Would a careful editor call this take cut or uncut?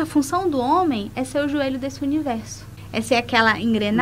cut